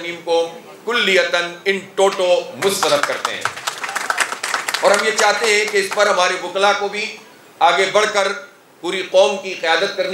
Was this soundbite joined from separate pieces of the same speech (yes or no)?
no